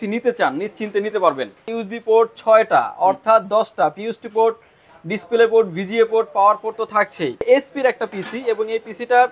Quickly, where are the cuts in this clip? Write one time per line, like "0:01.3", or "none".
0:01.8
0:07.4